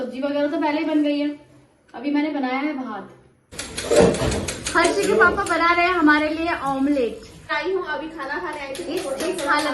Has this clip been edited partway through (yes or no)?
yes